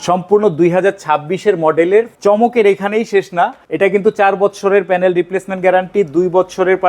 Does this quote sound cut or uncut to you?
cut